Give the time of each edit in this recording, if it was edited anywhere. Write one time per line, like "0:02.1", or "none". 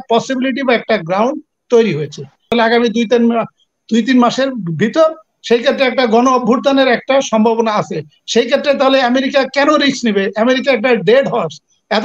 0:02.5